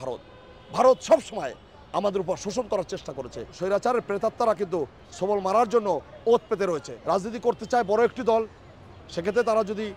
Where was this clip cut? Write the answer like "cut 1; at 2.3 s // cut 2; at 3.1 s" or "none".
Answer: cut 1; at 3.6 s // cut 2; at 6.9 s